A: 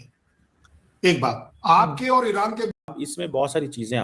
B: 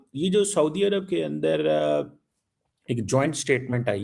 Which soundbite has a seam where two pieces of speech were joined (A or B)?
A